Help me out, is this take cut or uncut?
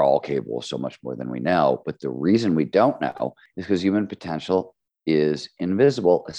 cut